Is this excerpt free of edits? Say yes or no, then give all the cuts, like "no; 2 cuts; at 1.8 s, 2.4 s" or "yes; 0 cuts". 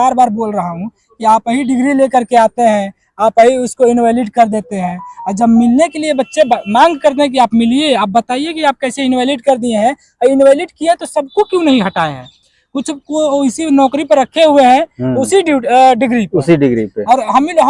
yes; 0 cuts